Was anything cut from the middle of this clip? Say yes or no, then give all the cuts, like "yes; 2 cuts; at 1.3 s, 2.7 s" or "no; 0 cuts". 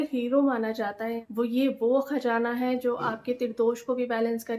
yes; 1 cut; at 1.1 s